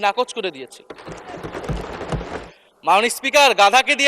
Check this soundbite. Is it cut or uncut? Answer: cut